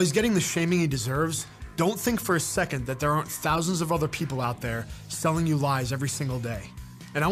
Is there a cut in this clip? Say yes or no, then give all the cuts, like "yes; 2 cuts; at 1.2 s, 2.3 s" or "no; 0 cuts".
no; 0 cuts